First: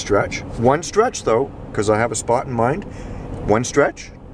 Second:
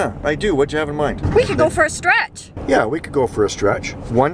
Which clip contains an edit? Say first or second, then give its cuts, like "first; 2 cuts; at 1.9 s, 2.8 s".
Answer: second; 2 cuts; at 1.2 s, 2.5 s